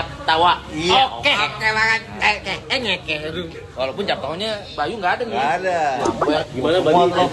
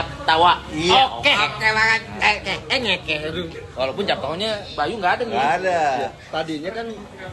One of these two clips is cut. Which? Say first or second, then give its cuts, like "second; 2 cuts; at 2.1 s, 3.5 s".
first; 1 cut; at 6.1 s